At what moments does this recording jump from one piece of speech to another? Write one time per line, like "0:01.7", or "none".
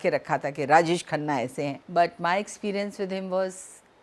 0:01.8